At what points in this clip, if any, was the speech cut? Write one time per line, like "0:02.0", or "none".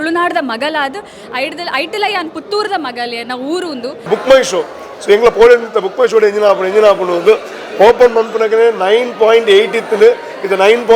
0:04.1